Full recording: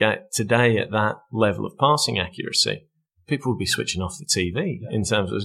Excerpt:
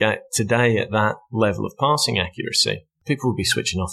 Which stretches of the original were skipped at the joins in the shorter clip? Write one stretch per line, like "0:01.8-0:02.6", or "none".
0:02.9-0:03.1